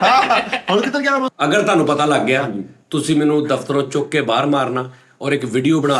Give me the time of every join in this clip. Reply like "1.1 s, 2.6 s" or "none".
1.3 s